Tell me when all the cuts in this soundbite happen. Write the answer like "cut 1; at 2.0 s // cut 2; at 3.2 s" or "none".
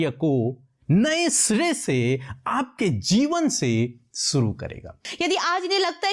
cut 1; at 5.1 s